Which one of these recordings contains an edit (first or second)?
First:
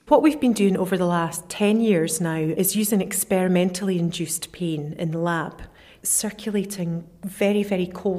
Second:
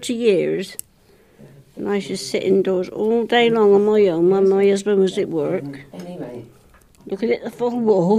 first